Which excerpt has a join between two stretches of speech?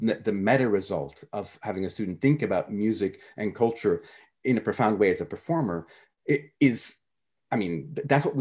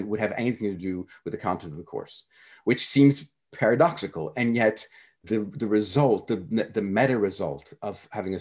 second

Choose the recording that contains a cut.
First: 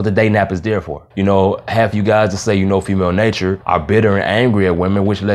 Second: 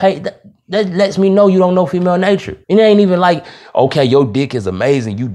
first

